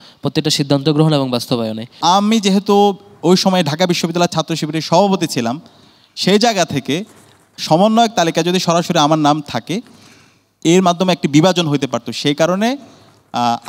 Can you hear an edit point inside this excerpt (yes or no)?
yes